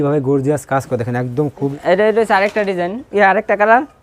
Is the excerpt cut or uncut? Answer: cut